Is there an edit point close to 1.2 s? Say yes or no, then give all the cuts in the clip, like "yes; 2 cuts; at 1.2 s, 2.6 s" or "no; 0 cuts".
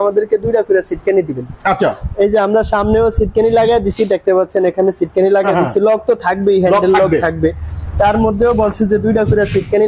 no; 0 cuts